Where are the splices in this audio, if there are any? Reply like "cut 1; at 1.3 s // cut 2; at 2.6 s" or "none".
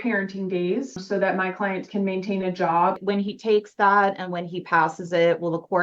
cut 1; at 1.0 s // cut 2; at 3.0 s